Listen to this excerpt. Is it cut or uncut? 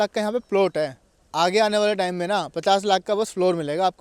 uncut